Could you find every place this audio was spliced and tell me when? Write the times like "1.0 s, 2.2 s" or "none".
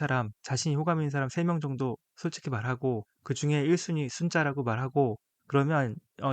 3.1 s, 5.3 s

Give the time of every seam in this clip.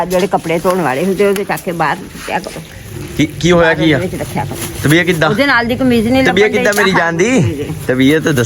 none

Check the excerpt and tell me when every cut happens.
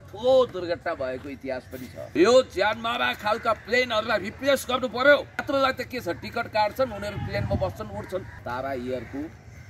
2.0 s, 5.4 s, 8.4 s

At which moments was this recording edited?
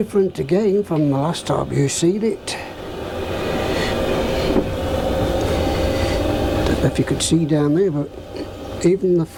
none

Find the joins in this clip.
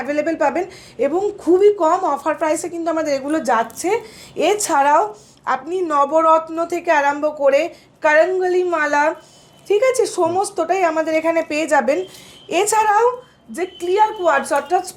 none

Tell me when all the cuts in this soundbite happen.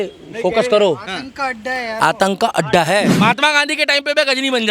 3.1 s

